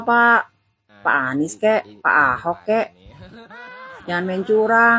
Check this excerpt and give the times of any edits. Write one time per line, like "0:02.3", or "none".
none